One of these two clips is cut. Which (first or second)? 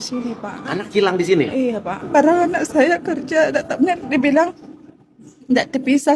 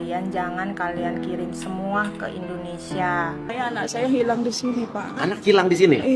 second